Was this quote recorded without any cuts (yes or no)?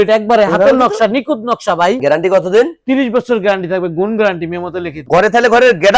no